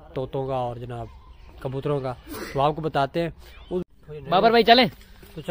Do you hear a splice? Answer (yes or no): yes